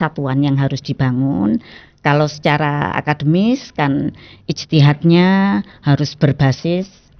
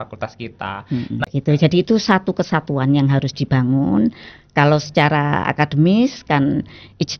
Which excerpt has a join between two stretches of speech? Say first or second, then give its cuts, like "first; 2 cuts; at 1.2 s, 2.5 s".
second; 1 cut; at 1.3 s